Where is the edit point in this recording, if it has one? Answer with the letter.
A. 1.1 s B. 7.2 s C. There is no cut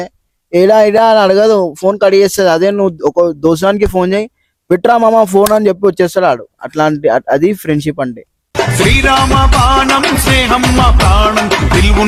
C